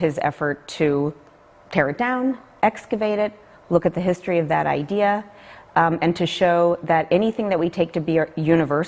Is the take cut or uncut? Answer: cut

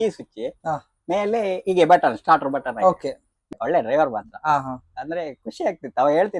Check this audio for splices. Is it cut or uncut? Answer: cut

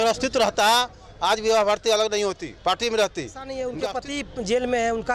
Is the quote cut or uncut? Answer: cut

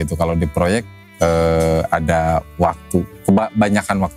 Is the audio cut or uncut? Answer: uncut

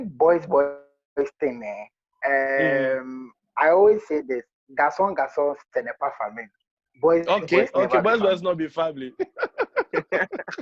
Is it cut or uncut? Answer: uncut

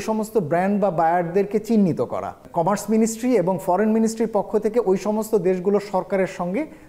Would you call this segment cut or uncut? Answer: uncut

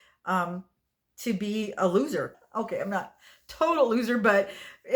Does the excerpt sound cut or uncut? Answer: cut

